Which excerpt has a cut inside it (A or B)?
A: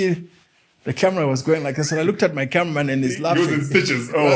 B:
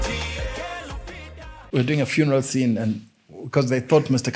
B